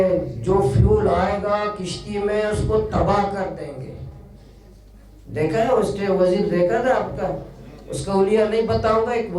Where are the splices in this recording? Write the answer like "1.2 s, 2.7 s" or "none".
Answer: none